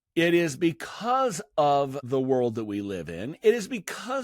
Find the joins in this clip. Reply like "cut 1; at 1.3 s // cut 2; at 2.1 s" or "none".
cut 1; at 2.0 s